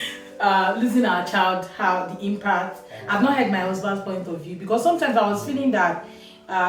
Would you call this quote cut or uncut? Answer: uncut